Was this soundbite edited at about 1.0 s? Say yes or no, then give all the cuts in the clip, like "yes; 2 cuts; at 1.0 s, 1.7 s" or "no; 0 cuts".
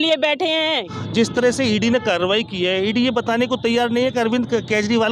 yes; 1 cut; at 1.0 s